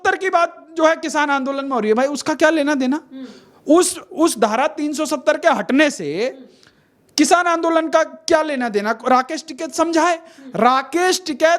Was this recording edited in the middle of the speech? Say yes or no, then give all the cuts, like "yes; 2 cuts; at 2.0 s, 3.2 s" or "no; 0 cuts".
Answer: no; 0 cuts